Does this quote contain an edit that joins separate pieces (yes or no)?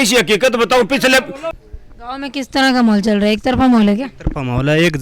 yes